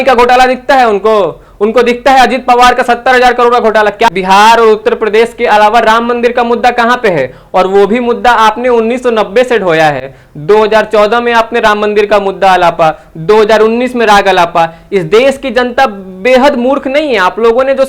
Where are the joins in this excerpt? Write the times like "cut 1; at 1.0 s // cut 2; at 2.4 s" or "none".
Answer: cut 1; at 4.1 s